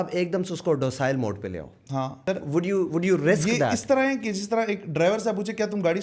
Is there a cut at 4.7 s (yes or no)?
no